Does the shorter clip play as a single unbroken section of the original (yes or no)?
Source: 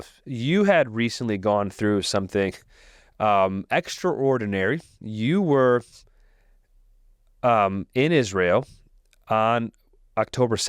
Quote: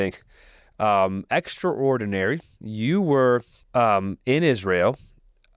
no